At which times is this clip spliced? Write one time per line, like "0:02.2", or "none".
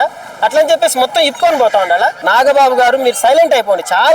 0:02.2